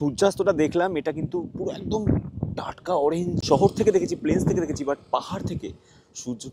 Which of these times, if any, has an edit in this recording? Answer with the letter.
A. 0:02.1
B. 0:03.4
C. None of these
B